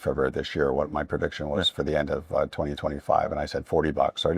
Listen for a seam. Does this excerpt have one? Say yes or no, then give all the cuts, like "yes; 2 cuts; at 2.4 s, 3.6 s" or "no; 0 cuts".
no; 0 cuts